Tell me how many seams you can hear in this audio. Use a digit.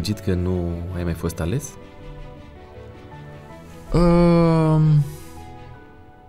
0